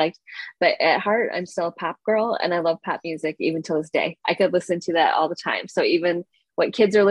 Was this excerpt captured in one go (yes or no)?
yes